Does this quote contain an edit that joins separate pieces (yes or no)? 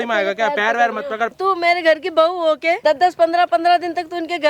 yes